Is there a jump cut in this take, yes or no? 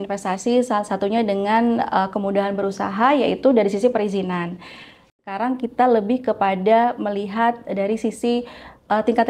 yes